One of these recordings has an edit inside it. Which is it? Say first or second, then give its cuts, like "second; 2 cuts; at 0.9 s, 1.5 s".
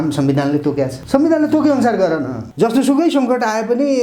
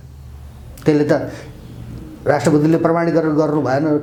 first; 2 cuts; at 1.0 s, 2.4 s